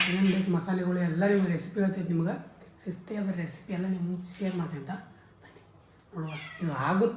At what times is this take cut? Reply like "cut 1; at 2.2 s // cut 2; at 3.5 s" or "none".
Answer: none